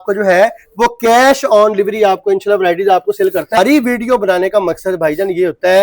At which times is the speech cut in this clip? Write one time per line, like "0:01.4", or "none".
0:03.6